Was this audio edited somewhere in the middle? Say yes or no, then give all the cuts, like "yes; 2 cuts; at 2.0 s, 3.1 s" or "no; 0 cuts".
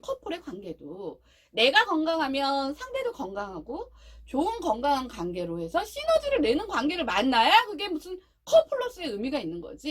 no; 0 cuts